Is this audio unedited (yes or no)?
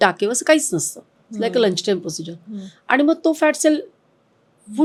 yes